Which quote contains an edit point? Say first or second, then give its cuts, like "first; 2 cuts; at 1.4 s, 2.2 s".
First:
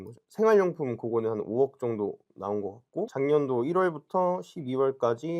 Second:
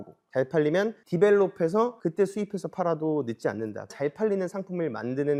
first; 1 cut; at 3.1 s